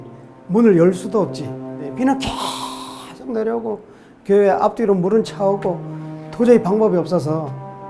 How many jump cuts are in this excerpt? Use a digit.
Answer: 1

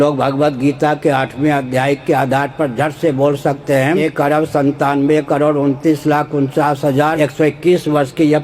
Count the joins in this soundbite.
2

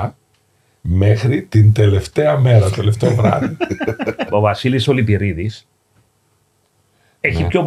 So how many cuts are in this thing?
1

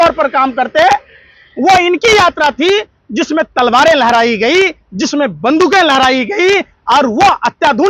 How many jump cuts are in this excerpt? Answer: 0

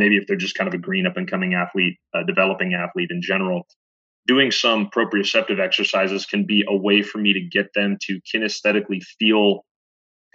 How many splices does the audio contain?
0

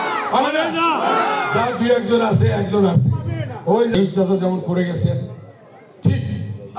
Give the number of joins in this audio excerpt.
1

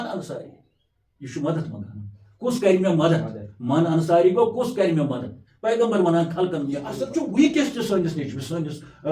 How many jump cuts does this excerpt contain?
1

